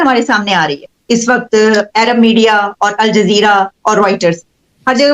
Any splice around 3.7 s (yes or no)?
no